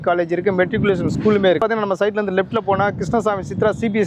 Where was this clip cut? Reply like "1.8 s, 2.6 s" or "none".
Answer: 1.6 s